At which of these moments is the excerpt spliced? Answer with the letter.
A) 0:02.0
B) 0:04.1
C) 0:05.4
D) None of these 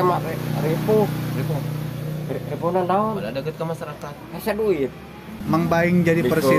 C